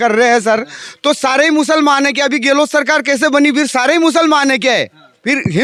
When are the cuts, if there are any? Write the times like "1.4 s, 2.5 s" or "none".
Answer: none